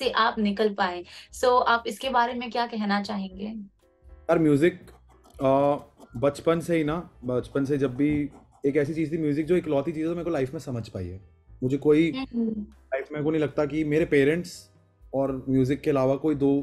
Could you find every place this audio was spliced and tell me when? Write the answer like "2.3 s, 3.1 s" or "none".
none